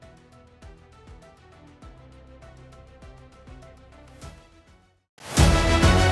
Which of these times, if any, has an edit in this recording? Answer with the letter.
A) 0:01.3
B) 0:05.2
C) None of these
B